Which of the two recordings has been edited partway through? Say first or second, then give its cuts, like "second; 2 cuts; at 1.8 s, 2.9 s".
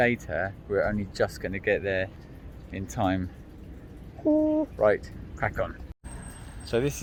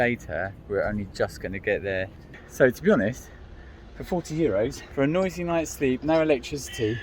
second; 2 cuts; at 2.4 s, 4.8 s